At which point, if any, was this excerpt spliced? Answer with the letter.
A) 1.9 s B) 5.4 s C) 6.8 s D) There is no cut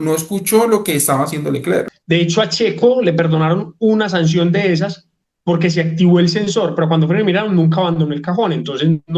A